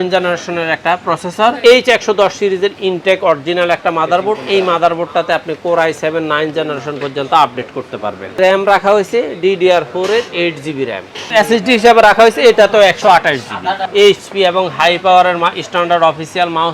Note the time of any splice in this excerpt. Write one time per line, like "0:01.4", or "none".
0:01.6
0:08.4
0:11.3
0:13.8